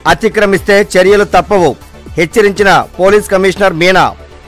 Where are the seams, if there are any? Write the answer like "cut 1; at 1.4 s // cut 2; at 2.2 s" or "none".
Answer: none